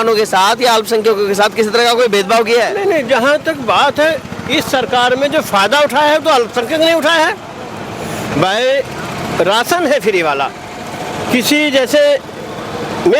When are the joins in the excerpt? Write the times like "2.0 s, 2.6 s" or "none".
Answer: none